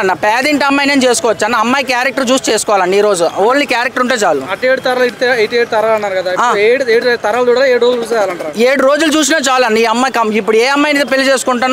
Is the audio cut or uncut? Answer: uncut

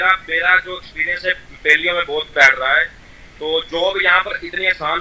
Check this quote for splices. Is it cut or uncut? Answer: uncut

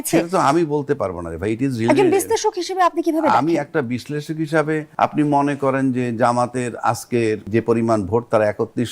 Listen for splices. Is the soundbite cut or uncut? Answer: cut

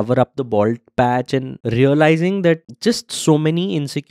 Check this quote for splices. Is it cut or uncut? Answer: cut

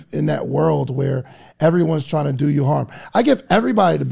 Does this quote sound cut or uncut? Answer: uncut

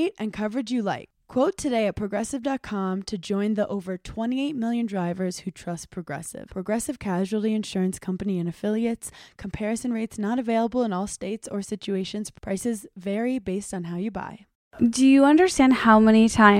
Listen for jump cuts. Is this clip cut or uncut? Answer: cut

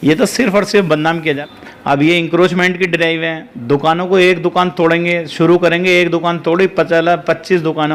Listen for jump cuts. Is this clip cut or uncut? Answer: cut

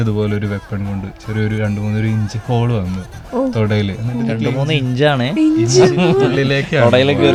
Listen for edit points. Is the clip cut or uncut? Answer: uncut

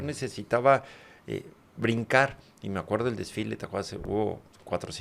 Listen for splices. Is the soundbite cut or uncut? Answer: uncut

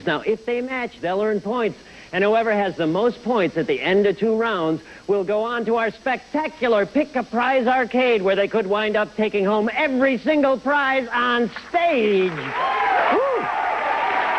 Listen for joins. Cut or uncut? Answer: cut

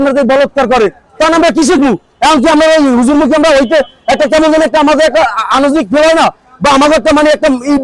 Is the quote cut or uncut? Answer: uncut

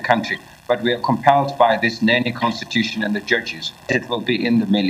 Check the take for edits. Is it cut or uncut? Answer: cut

